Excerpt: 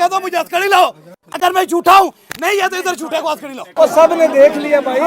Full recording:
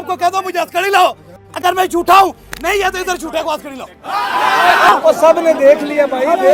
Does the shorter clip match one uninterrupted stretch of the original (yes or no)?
no